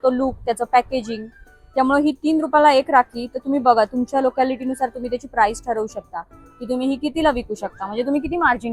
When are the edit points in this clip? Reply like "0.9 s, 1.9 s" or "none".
none